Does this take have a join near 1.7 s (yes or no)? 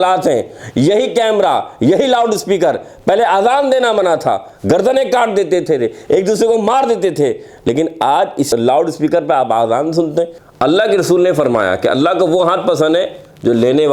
no